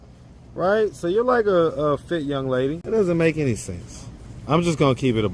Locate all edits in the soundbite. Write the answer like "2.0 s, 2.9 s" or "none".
2.8 s